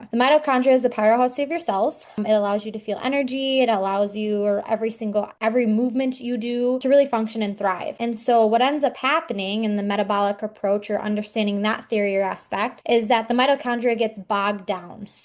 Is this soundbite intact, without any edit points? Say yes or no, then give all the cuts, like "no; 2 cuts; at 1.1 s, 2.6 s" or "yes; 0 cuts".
yes; 0 cuts